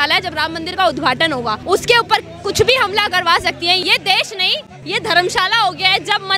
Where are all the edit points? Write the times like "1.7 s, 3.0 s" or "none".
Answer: 1.6 s, 3.8 s, 4.7 s